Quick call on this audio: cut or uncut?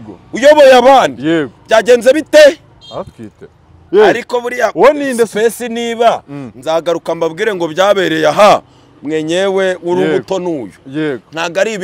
cut